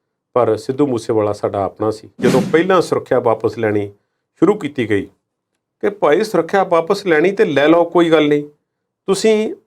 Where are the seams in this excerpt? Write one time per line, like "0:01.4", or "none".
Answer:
0:02.1